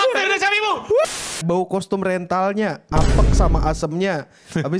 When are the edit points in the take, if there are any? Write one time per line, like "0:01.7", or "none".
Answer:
0:01.1